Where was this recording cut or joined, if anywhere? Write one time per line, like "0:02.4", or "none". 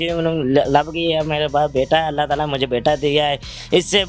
none